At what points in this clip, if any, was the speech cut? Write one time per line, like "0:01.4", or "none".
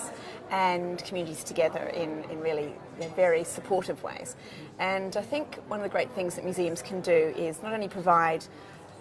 0:07.3